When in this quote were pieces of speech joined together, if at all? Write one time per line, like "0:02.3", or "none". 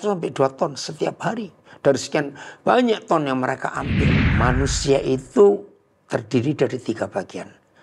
0:04.1